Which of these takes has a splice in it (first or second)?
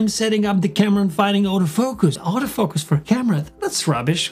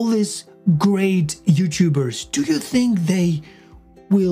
first